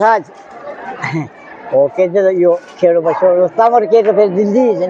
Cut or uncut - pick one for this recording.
uncut